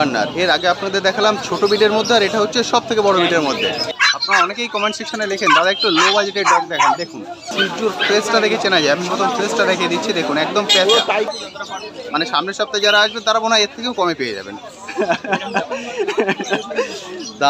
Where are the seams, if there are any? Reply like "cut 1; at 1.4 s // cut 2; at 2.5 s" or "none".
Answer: cut 1; at 3.9 s // cut 2; at 7.4 s // cut 3; at 11.3 s